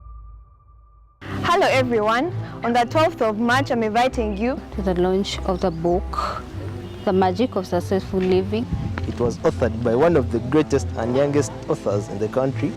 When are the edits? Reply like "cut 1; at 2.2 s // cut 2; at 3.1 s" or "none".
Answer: cut 1; at 1.1 s

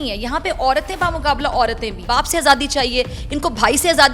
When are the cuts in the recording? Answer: cut 1; at 2.0 s

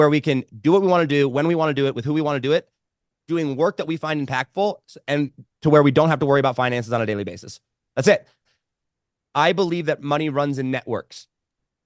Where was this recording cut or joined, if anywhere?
cut 1; at 8.4 s

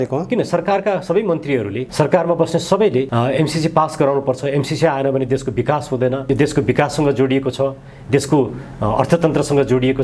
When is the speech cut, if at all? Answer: cut 1; at 1.8 s // cut 2; at 3.1 s // cut 3; at 6.2 s

